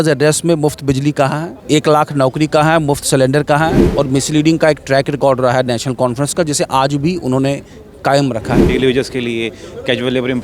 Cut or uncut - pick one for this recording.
cut